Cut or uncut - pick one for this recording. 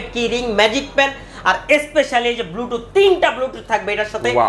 uncut